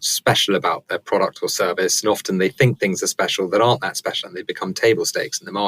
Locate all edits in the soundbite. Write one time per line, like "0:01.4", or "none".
none